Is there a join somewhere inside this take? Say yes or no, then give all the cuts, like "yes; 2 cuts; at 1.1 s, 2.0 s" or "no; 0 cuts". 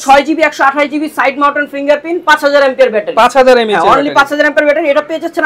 no; 0 cuts